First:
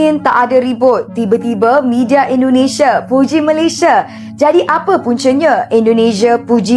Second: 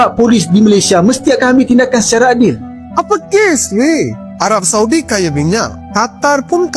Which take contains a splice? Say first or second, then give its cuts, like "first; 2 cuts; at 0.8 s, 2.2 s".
second; 1 cut; at 2.8 s